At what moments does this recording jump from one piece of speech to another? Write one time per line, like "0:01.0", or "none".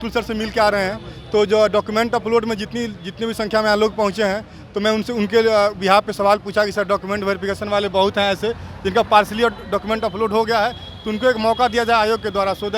none